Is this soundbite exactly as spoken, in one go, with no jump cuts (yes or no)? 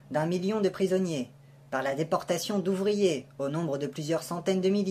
no